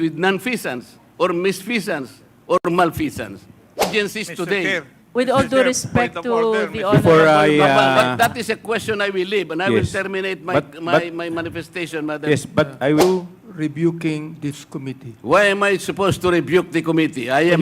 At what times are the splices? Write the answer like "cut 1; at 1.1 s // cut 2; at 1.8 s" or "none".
cut 1; at 3.9 s // cut 2; at 13.0 s